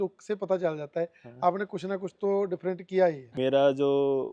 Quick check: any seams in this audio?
yes; 1 cut; at 3.3 s

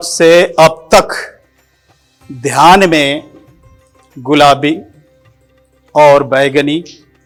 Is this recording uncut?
yes; 0 cuts

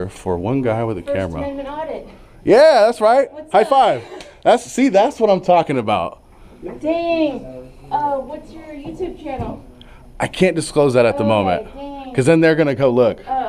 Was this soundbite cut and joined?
no; 0 cuts

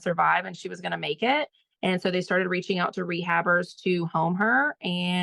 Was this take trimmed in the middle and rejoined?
no; 0 cuts

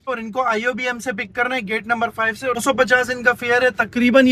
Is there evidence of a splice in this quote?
no; 0 cuts

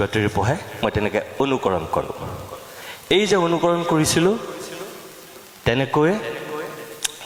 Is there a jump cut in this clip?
no; 0 cuts

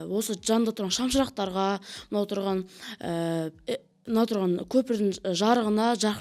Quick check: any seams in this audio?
no; 0 cuts

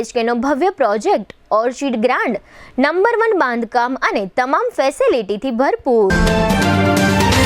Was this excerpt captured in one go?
no; 1 cut; at 6.1 s

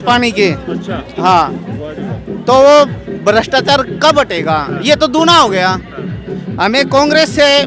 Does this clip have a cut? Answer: no; 0 cuts

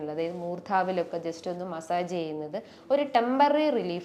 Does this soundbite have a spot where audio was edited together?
no; 0 cuts

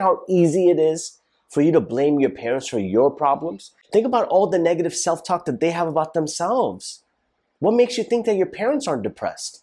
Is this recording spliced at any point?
yes; 1 cut; at 3.7 s

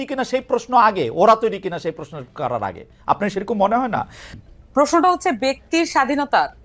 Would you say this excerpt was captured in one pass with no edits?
no; 1 cut; at 4.2 s

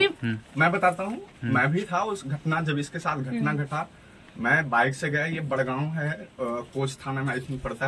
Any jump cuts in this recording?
no; 0 cuts

